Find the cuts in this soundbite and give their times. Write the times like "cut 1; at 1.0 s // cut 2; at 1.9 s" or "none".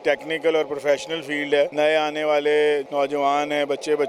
cut 1; at 1.7 s // cut 2; at 2.9 s